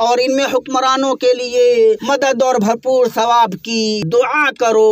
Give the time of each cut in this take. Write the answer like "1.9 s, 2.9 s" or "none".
2.0 s, 4.0 s